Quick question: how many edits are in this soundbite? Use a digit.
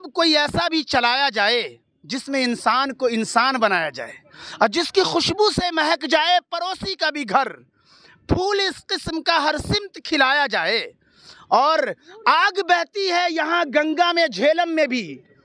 0